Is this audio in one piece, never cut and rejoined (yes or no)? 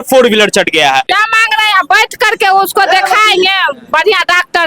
no